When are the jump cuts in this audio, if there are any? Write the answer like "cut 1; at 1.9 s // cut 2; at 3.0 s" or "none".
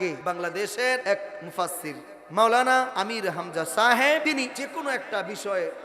cut 1; at 1.0 s // cut 2; at 2.9 s // cut 3; at 4.4 s